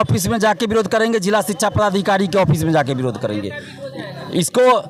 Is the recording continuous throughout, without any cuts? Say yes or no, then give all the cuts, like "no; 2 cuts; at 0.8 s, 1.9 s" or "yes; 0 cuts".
yes; 0 cuts